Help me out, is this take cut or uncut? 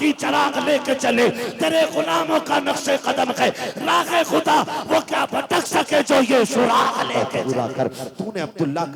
cut